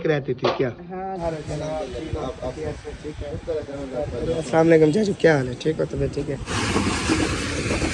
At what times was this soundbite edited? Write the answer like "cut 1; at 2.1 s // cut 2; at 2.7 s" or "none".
cut 1; at 1.2 s // cut 2; at 6.5 s